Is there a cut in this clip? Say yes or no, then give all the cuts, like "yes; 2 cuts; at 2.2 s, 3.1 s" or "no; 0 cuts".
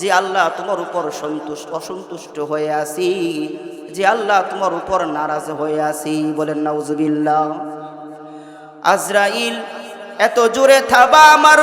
no; 0 cuts